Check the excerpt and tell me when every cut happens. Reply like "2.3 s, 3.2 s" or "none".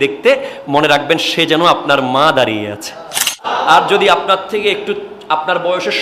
3.5 s